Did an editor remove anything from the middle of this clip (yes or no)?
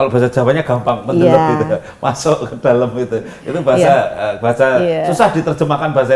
no